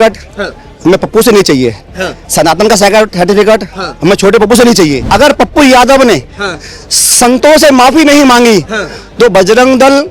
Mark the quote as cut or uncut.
cut